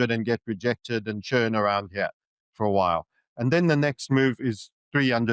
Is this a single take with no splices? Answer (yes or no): yes